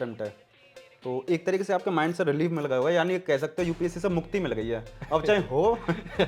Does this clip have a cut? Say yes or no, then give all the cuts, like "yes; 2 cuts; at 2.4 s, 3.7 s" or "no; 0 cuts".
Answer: no; 0 cuts